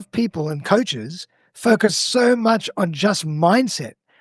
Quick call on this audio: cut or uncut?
uncut